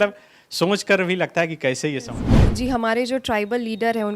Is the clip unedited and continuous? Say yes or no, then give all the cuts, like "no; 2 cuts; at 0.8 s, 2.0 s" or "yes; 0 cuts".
no; 1 cut; at 2.3 s